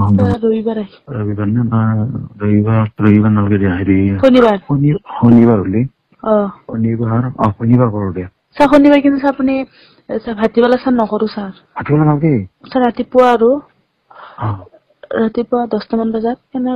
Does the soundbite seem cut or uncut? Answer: cut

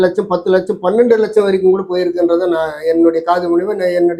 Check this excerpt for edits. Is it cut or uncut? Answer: uncut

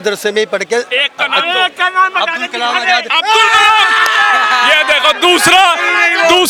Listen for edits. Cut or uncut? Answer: uncut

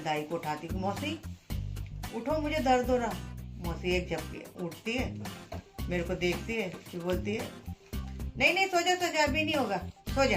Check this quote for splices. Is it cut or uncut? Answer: uncut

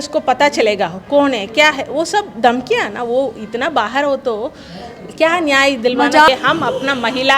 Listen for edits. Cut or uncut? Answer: cut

